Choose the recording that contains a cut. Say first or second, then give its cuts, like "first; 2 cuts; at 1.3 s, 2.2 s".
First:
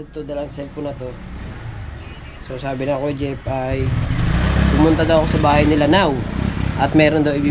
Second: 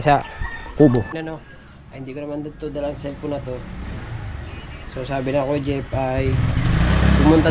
second; 1 cut; at 1.2 s